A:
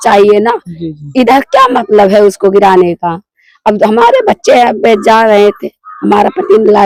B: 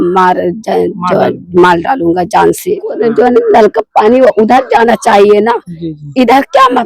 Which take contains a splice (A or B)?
B